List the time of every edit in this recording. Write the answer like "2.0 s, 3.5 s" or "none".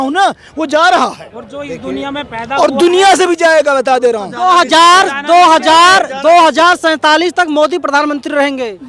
none